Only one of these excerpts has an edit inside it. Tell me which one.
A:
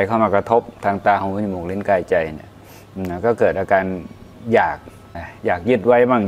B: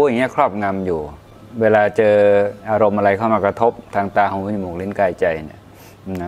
A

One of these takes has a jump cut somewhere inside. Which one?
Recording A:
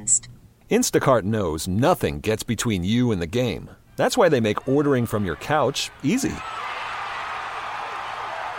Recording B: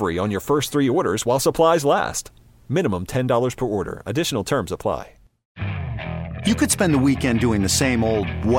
B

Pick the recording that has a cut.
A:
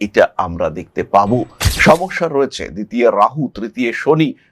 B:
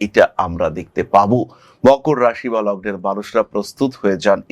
A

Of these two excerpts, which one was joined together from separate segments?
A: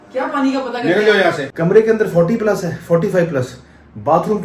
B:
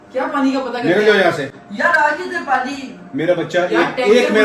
A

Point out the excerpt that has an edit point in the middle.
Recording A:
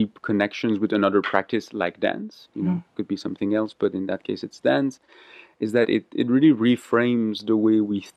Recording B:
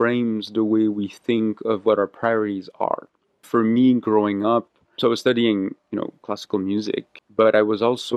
B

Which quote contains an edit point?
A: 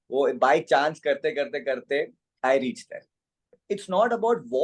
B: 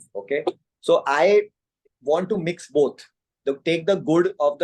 A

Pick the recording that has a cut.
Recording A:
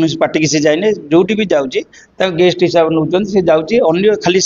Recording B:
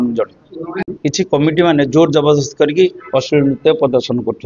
B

